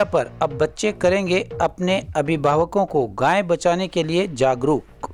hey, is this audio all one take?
yes; 0 cuts

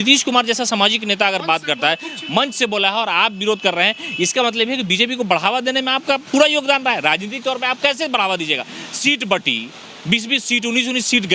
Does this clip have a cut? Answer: no; 0 cuts

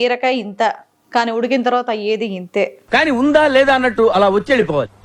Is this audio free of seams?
yes; 0 cuts

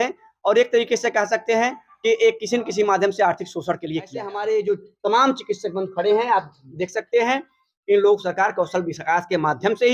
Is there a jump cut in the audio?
yes; 1 cut; at 4.3 s

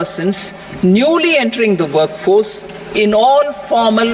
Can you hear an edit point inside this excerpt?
no; 0 cuts

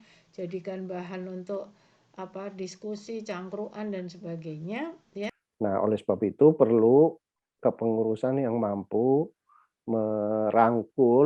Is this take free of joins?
no; 1 cut; at 5.4 s

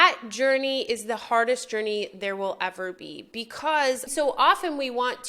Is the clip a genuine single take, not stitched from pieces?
no; 1 cut; at 4.1 s

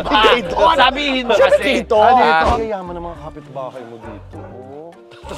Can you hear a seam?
yes; 1 cut; at 2.6 s

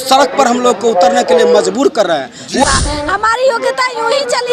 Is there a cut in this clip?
yes; 1 cut; at 2.6 s

